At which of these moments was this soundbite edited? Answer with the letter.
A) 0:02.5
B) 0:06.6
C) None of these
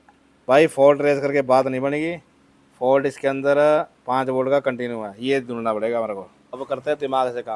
B